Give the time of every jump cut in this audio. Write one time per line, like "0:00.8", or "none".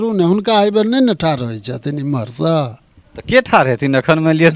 none